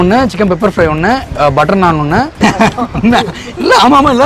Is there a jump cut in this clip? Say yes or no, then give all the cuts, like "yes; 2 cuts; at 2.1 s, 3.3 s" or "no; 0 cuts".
yes; 1 cut; at 2.4 s